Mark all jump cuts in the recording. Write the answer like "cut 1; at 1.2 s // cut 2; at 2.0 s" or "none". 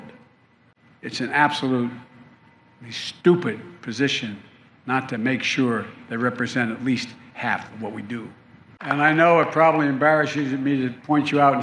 cut 1; at 8.8 s